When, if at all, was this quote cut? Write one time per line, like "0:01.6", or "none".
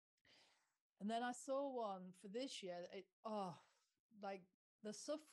0:03.1